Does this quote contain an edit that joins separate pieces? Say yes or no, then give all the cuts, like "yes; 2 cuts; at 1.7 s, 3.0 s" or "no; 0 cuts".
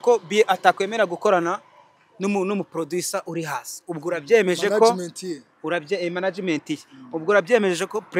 no; 0 cuts